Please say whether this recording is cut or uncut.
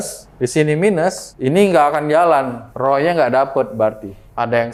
uncut